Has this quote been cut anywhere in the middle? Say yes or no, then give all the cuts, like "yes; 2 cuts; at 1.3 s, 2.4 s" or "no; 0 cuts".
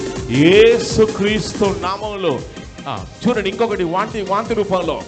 yes; 1 cut; at 2.5 s